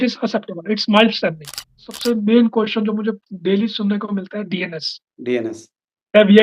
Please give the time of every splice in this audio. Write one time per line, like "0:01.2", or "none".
0:01.8